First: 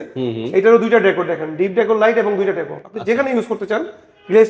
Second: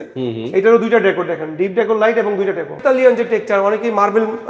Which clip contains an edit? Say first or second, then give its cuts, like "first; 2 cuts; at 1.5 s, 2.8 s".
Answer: second; 1 cut; at 2.8 s